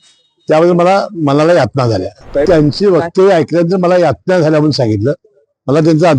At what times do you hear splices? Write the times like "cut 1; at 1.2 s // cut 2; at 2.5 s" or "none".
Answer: cut 1; at 2.5 s

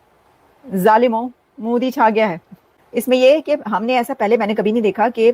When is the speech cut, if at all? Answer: cut 1; at 2.7 s

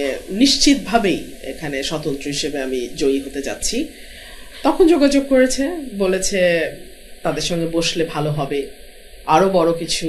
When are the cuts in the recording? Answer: none

